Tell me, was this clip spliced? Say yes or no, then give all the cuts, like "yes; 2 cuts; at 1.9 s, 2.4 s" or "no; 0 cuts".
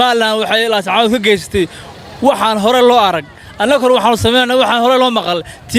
no; 0 cuts